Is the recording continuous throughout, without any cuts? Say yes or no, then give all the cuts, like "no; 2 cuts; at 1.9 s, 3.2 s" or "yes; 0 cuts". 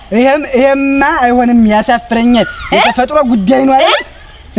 yes; 0 cuts